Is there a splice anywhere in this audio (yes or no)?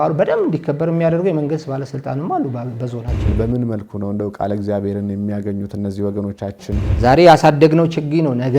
yes